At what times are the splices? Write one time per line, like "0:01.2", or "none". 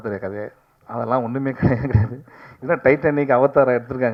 none